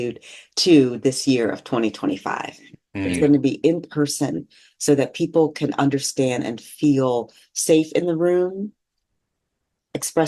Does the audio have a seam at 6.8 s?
no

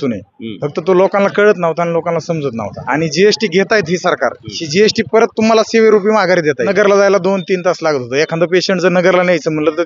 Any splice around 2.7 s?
yes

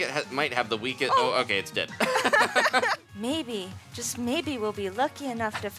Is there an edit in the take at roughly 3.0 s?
yes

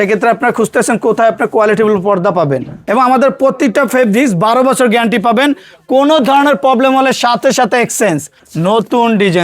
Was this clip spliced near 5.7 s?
no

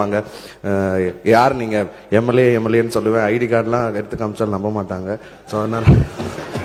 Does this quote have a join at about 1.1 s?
no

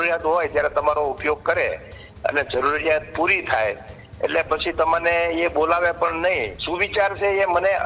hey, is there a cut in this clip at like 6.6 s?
yes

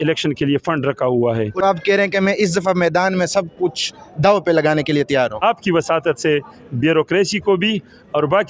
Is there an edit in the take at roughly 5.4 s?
yes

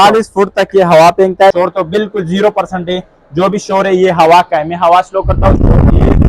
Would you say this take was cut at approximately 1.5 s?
yes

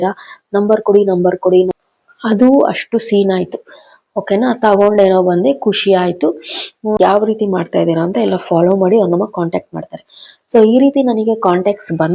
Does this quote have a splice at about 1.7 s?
yes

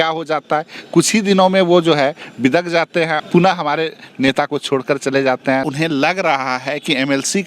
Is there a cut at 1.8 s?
no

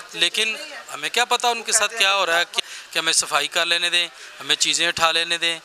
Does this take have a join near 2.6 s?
yes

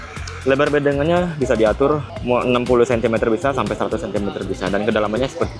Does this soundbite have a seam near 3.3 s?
no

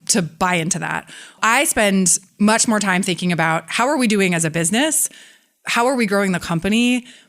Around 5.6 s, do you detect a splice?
no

